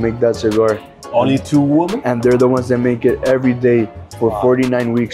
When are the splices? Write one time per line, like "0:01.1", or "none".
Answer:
none